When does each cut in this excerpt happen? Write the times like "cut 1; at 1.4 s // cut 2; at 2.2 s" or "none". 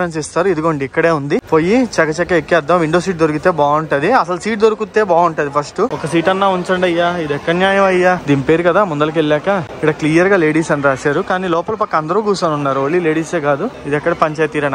cut 1; at 1.4 s // cut 2; at 5.9 s // cut 3; at 8.2 s // cut 4; at 9.7 s // cut 5; at 13.8 s